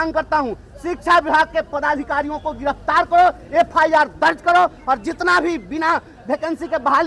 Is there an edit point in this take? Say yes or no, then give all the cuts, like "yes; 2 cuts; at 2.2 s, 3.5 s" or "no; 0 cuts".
no; 0 cuts